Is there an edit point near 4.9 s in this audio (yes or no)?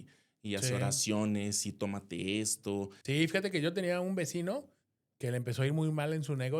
no